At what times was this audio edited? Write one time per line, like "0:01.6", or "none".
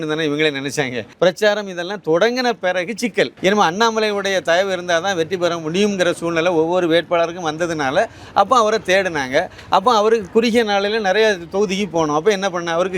0:01.0
0:03.3

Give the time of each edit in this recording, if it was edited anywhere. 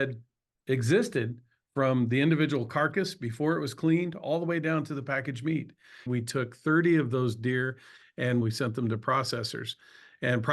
0:06.1
0:08.4

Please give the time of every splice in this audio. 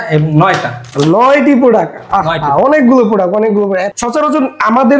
0:03.8

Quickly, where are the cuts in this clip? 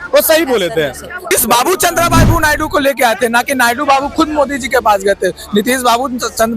0:01.3

